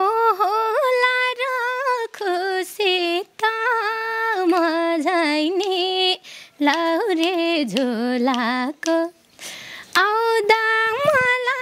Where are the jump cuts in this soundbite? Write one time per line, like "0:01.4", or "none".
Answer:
none